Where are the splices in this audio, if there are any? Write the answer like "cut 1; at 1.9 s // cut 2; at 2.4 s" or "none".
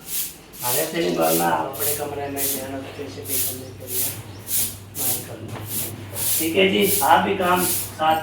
cut 1; at 1.7 s // cut 2; at 5.8 s

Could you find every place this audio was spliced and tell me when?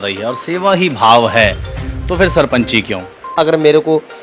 cut 1; at 3.3 s

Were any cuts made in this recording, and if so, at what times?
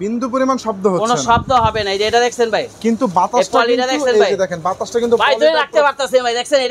none

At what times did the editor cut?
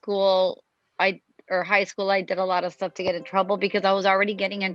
none

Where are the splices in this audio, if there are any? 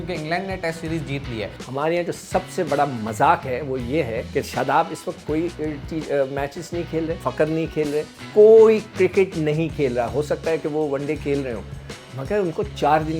cut 1; at 1.6 s // cut 2; at 4.2 s // cut 3; at 7.2 s // cut 4; at 8.2 s

